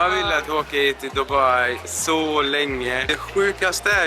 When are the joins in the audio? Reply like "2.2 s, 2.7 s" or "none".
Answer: 3.1 s